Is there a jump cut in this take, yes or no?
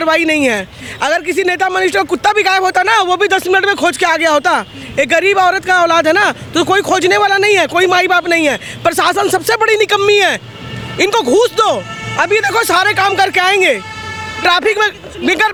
no